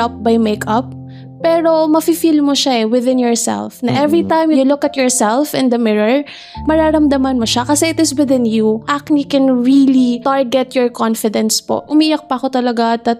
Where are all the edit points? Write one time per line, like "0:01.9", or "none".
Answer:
0:04.6
0:06.5
0:08.9
0:10.2
0:11.8